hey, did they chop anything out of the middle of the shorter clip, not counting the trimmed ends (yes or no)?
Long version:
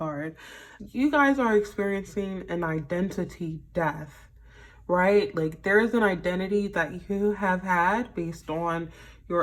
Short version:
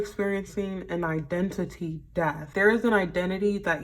yes